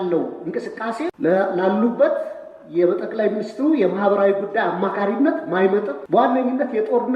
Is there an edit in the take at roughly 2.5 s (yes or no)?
no